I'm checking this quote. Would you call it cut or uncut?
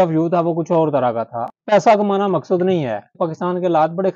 cut